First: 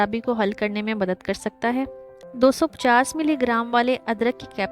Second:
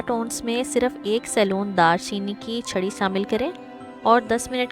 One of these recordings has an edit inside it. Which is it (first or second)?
first